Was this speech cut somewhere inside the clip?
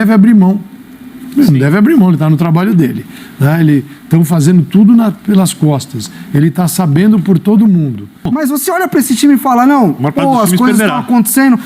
yes; 1 cut; at 8.3 s

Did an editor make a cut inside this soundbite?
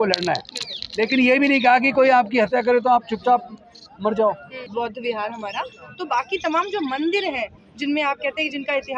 yes; 1 cut; at 4.6 s

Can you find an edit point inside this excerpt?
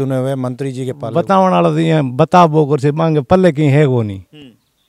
yes; 1 cut; at 1.0 s

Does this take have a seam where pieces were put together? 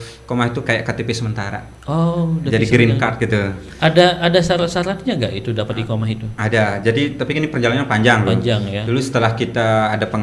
no; 0 cuts

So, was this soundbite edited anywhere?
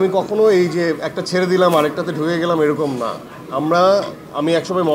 no; 0 cuts

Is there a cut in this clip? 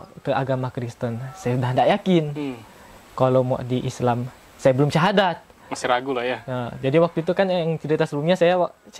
no; 0 cuts

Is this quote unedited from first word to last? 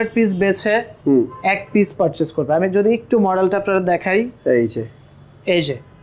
yes; 0 cuts

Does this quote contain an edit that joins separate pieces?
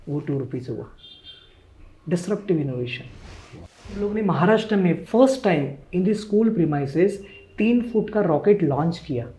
yes; 1 cut; at 3.9 s

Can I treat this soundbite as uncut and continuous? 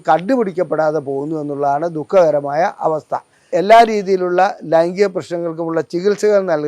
no; 1 cut; at 3.5 s

